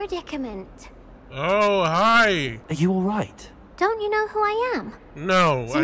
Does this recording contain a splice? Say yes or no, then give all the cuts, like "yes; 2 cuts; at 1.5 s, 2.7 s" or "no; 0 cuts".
yes; 1 cut; at 2.7 s